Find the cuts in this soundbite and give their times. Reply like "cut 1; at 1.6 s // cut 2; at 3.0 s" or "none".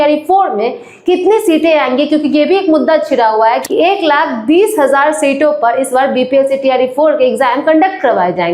cut 1; at 3.6 s